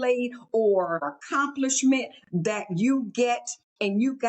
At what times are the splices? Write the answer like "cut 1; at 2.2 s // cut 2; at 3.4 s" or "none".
cut 1; at 1.1 s

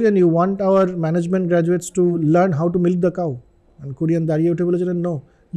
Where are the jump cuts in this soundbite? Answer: cut 1; at 2.1 s

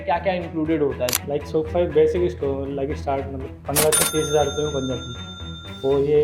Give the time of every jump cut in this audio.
cut 1; at 1.2 s

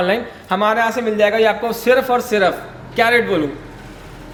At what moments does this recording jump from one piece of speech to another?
none

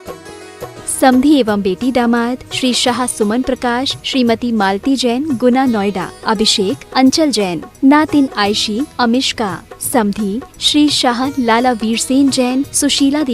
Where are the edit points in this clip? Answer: cut 1; at 1.0 s

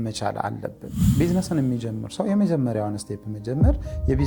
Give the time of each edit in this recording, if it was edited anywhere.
cut 1; at 1.0 s

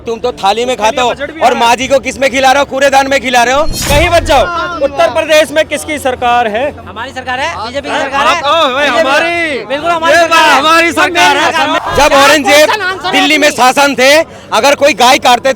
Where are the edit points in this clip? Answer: cut 1; at 3.8 s // cut 2; at 11.8 s

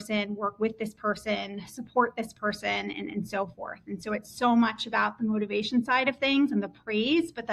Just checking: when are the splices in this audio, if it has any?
none

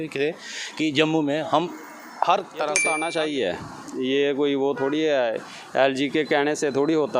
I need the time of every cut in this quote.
cut 1; at 2.8 s

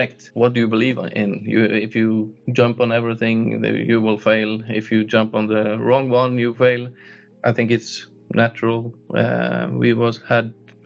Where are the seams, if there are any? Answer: none

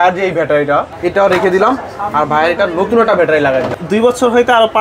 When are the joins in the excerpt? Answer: cut 1; at 0.9 s // cut 2; at 3.8 s

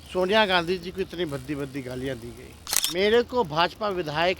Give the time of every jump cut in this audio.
cut 1; at 2.9 s

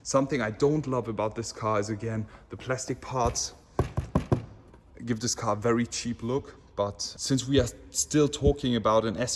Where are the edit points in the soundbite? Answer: none

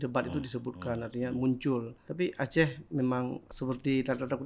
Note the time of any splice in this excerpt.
cut 1; at 2.0 s // cut 2; at 3.4 s

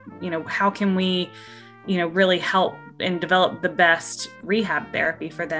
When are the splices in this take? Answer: cut 1; at 4.4 s

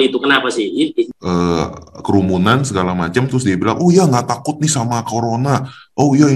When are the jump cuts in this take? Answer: cut 1; at 1.1 s

